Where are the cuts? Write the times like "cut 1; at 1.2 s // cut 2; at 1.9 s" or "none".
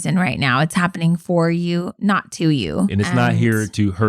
cut 1; at 2.9 s